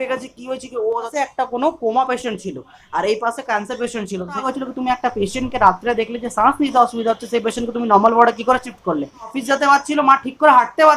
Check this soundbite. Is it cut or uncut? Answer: cut